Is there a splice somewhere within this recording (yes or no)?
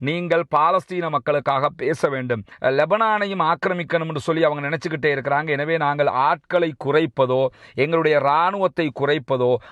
yes